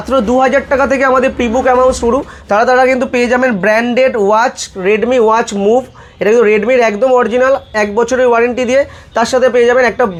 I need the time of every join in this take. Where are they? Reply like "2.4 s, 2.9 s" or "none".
none